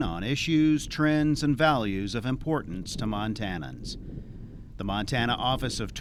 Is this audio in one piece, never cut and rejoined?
yes; 0 cuts

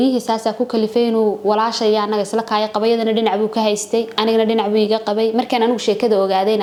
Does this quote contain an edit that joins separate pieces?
no; 0 cuts

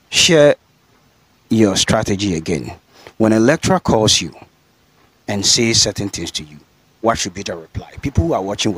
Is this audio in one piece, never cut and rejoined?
yes; 0 cuts

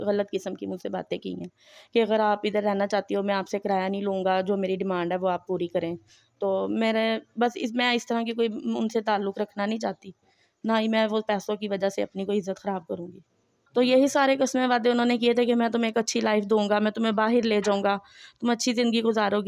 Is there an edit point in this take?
yes; 1 cut; at 13.5 s

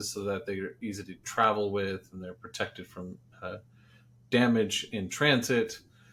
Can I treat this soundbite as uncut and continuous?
yes; 0 cuts

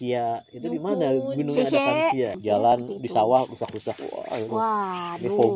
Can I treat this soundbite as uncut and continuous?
no; 1 cut; at 2.7 s

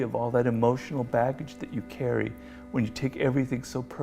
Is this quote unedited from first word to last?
yes; 0 cuts

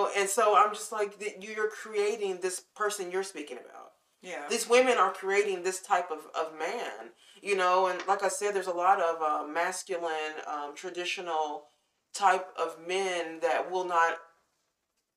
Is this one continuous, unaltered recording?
yes; 0 cuts

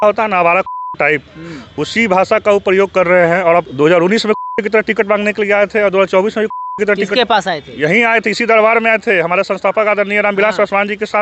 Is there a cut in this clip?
yes; 1 cut; at 3.7 s

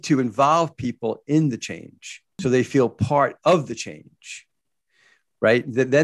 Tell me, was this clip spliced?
yes; 1 cut; at 2.4 s

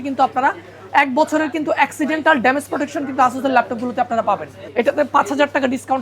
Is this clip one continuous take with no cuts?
no; 1 cut; at 4.6 s

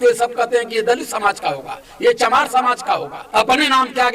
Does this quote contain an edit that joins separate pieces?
yes; 1 cut; at 3.2 s

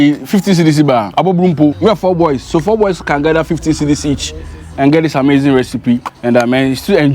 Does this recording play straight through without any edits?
no; 3 cuts; at 1.1 s, 1.8 s, 6.1 s

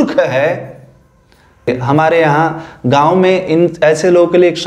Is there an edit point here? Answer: yes; 1 cut; at 1.8 s

